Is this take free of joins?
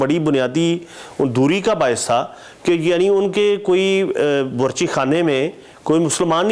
yes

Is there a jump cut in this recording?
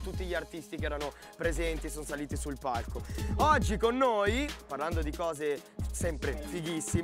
no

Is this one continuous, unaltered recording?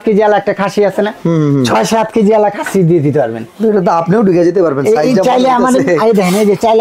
yes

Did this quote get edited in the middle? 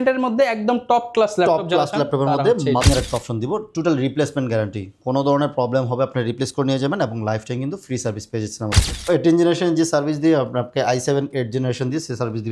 yes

